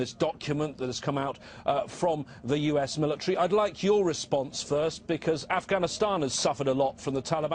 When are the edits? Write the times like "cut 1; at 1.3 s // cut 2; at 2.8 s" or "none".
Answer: cut 1; at 6.6 s